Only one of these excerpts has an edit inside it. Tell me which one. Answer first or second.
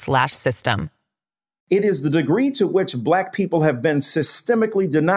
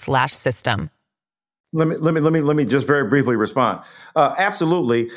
first